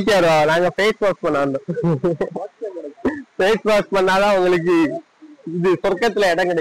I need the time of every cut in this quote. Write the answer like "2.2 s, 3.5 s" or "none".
none